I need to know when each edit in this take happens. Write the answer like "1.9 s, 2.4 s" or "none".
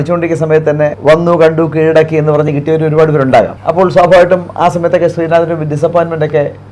1.0 s, 3.6 s